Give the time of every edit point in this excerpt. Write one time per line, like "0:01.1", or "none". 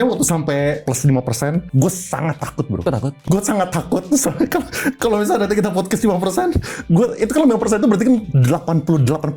0:00.8
0:01.7
0:03.2
0:08.3